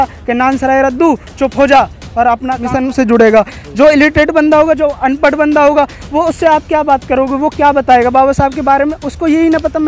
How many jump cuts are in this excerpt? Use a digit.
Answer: 1